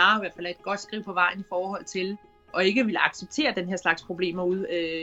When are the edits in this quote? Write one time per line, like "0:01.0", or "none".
0:02.4